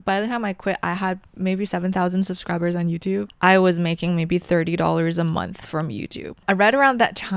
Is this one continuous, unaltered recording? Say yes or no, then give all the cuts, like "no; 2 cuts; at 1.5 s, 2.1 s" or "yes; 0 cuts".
no; 2 cuts; at 3.3 s, 6.4 s